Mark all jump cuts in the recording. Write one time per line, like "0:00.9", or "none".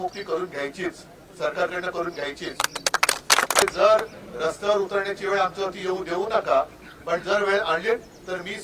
0:03.6